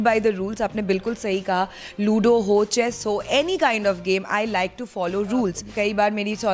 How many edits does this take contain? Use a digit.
1